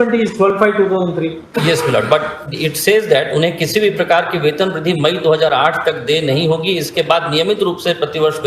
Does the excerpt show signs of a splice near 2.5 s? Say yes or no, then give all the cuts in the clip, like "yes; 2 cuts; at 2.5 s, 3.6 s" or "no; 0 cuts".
no; 0 cuts